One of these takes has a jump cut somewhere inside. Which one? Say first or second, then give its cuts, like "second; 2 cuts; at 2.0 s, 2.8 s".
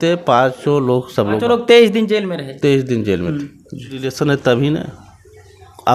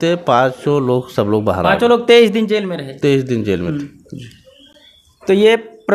first; 2 cuts; at 1.4 s, 4.1 s